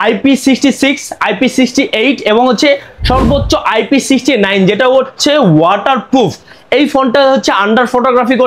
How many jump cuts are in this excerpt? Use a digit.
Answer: 0